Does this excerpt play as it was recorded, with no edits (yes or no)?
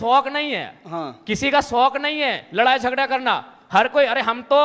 yes